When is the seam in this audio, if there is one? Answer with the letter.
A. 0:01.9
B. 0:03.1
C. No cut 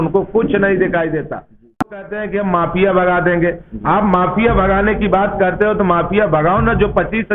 A